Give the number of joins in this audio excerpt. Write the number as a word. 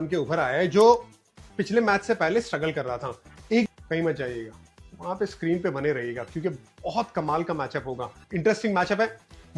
two